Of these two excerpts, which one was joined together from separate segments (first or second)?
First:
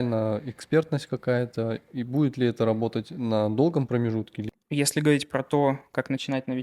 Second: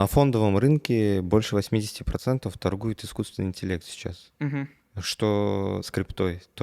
first